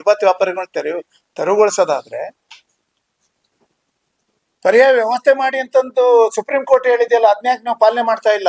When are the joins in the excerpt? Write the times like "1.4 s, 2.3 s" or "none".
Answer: none